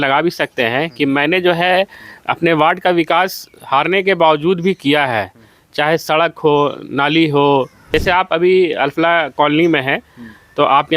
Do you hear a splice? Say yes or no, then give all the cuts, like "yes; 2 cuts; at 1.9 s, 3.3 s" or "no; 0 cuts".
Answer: yes; 1 cut; at 7.8 s